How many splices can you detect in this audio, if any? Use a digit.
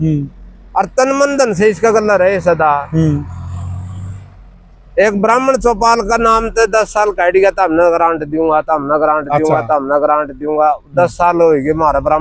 0